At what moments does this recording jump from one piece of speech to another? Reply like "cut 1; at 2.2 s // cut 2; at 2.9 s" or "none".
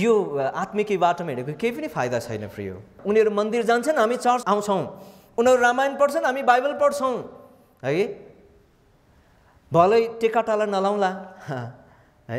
cut 1; at 2.9 s // cut 2; at 4.4 s